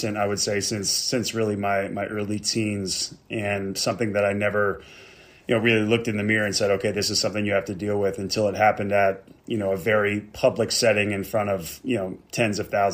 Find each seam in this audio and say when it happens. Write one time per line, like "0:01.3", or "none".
0:10.3